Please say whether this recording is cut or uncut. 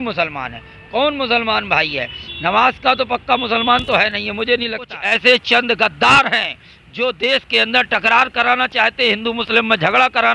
cut